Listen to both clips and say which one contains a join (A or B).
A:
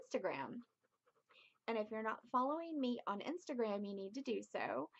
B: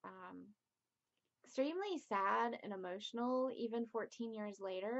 A